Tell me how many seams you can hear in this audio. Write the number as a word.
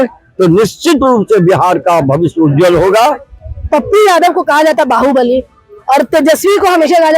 one